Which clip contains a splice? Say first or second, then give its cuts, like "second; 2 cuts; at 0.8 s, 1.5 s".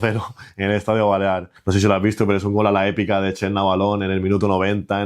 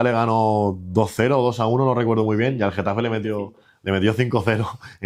first; 1 cut; at 1.5 s